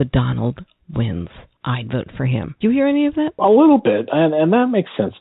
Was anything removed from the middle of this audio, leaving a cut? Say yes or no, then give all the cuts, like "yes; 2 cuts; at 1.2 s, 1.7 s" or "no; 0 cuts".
yes; 3 cuts; at 1.4 s, 2.5 s, 3.4 s